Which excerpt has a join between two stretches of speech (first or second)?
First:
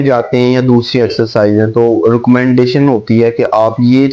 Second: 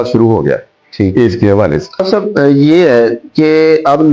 second